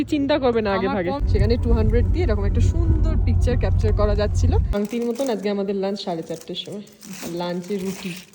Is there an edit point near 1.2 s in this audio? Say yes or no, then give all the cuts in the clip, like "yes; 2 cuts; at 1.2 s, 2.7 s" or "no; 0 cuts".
yes; 2 cuts; at 1.2 s, 4.7 s